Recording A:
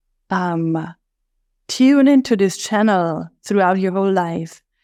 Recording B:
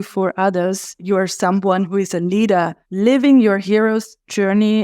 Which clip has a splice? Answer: B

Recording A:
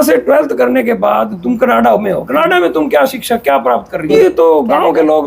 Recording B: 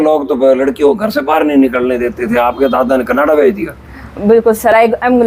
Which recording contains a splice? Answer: A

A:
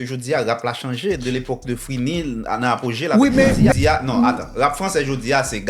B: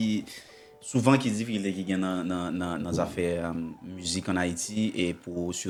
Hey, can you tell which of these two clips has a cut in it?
A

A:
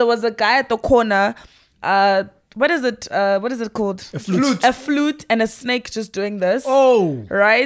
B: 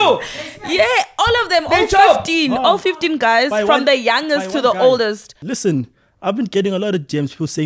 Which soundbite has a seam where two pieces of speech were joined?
B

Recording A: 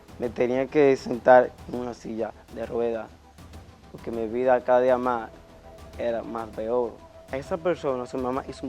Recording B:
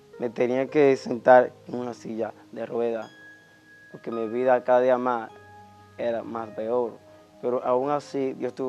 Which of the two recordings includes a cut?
A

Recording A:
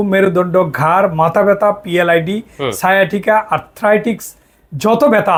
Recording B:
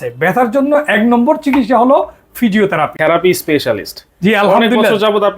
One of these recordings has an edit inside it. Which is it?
B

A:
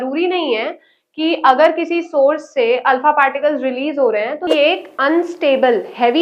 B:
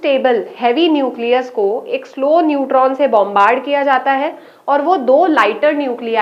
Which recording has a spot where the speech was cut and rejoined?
A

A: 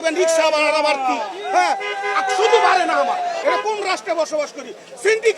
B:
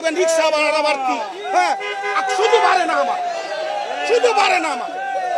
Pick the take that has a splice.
A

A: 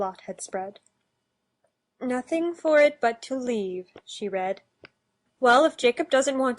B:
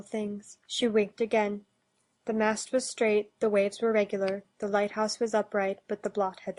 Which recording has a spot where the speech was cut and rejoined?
A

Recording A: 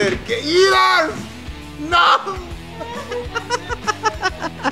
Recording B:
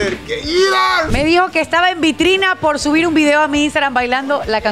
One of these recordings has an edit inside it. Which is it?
B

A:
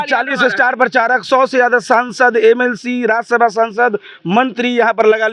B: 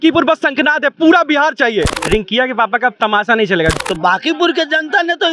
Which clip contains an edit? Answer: B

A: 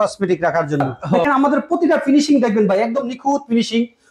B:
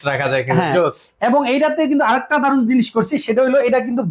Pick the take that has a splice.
A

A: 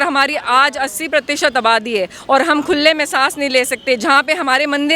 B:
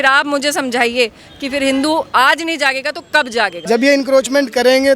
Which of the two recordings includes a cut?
B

